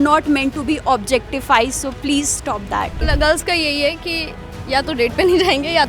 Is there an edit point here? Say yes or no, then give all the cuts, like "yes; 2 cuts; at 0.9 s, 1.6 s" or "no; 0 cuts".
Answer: yes; 1 cut; at 3.0 s